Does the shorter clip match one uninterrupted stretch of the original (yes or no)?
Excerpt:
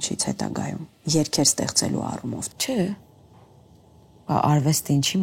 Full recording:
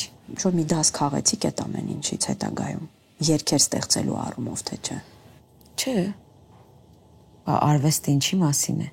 no